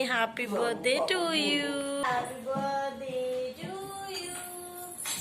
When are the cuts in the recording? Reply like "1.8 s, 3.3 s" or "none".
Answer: 2.0 s

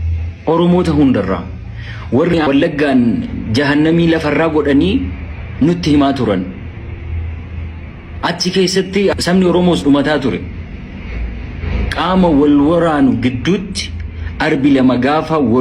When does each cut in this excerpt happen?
2.3 s, 9.1 s

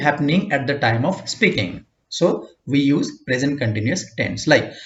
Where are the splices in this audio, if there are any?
none

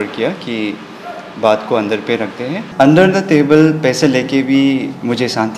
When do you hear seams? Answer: 2.7 s

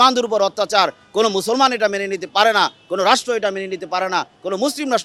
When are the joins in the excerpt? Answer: none

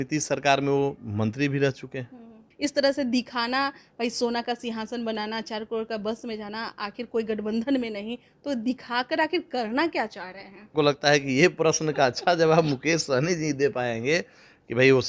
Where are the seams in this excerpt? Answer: 2.4 s, 10.7 s

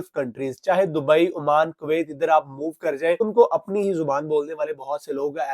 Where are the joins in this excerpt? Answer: 3.2 s

